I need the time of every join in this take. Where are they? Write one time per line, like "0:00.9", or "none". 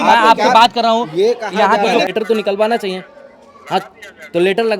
0:02.1